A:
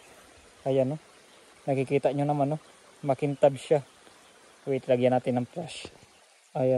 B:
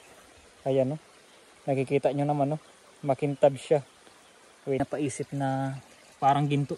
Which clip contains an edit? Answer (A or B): B